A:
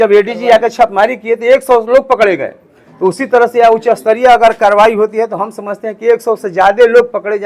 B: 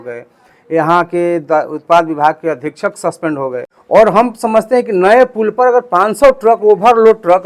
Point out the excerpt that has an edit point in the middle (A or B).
B